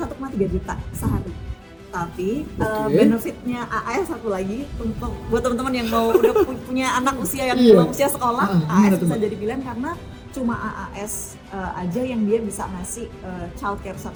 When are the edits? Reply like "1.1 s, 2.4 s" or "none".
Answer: none